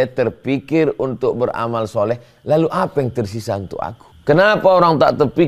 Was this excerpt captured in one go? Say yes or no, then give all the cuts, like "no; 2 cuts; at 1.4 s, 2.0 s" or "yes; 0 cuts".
no; 1 cut; at 4.1 s